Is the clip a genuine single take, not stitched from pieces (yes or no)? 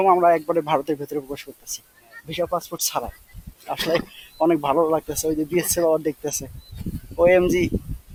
yes